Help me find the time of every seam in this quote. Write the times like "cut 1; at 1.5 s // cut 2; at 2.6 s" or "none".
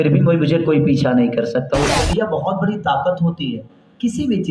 cut 1; at 1.9 s